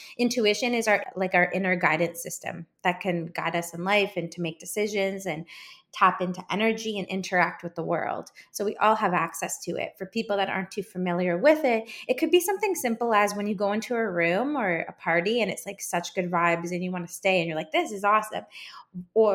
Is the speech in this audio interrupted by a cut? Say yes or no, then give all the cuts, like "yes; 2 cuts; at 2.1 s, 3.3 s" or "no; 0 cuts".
yes; 1 cut; at 1.0 s